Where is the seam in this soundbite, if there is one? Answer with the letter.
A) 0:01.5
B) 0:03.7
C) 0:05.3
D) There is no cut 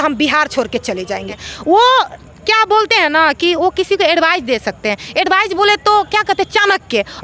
A